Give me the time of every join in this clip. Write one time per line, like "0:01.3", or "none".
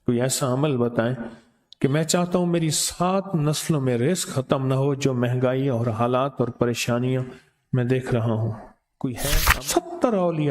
0:09.2